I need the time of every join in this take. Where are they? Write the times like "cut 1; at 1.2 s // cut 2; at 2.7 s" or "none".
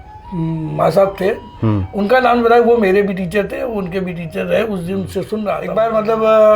cut 1; at 5.7 s